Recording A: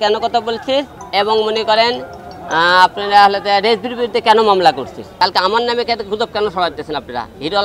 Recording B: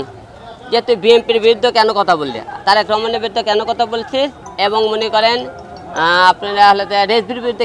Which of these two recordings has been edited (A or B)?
A